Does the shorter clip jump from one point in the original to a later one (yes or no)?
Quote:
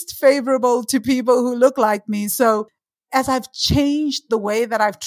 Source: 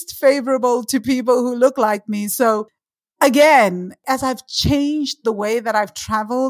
yes